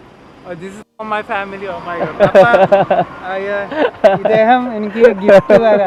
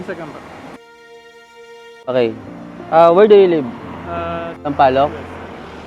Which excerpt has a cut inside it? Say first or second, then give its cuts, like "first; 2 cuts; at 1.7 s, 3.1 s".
second; 1 cut; at 4.5 s